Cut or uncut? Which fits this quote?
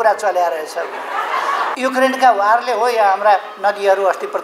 cut